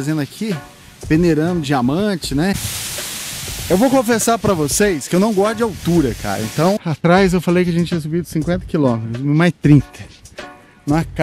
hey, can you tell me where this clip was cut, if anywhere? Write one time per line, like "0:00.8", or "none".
0:02.6
0:06.8

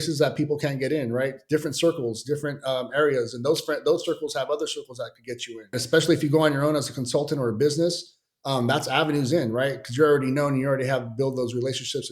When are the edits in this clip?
0:05.7

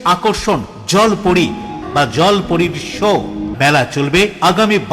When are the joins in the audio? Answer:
0:01.8
0:03.5

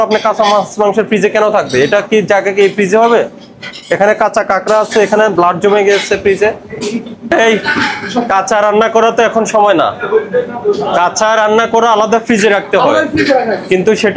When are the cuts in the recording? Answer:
0:07.1

